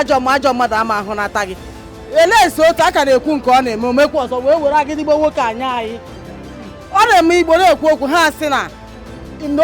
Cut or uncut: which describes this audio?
uncut